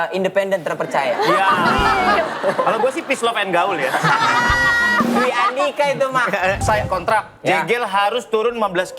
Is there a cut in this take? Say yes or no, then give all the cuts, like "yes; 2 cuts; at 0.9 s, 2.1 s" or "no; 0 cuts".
yes; 2 cuts; at 2.3 s, 6.6 s